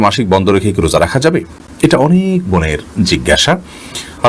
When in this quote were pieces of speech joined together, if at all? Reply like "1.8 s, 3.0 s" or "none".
none